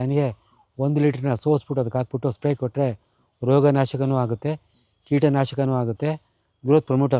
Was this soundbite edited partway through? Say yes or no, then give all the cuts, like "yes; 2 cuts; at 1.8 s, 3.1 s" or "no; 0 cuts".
no; 0 cuts